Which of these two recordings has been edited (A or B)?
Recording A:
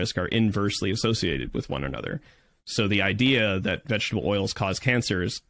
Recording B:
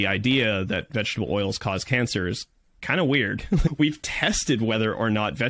B